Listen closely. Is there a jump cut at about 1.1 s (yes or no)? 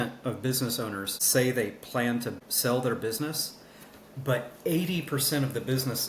yes